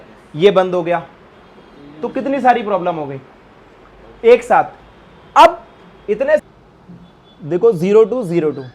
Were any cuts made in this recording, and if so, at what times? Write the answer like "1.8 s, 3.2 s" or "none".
6.4 s